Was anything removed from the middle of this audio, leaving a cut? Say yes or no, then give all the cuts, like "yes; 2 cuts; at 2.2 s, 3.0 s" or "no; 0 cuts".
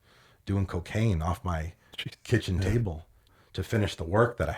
yes; 1 cut; at 3.3 s